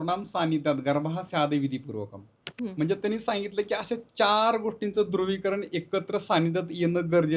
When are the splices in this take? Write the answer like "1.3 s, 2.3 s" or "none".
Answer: none